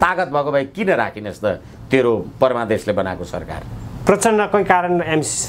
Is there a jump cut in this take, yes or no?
no